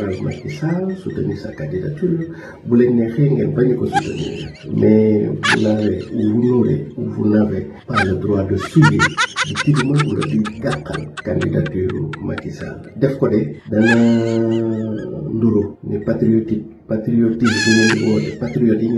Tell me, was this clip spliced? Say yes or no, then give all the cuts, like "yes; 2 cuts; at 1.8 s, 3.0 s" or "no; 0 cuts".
no; 0 cuts